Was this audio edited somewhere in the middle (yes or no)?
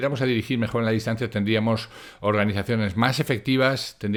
no